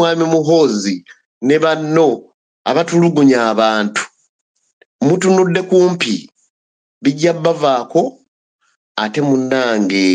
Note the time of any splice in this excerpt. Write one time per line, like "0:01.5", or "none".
none

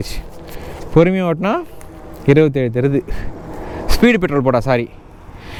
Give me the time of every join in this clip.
none

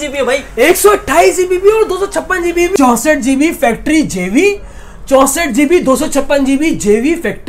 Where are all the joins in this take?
0:02.7

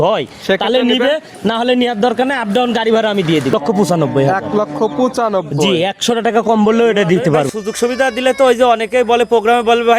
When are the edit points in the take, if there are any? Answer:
0:03.5
0:07.5

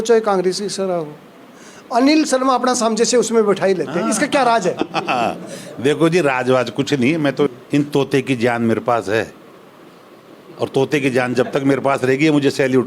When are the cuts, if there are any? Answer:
0:07.5

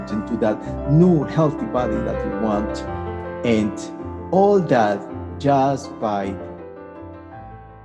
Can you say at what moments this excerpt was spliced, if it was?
0:06.9

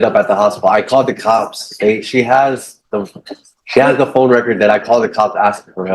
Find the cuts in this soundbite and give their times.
0:04.8

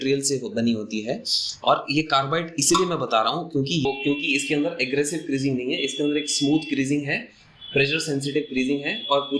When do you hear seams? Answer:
0:03.9

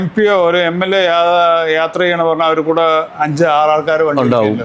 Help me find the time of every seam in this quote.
none

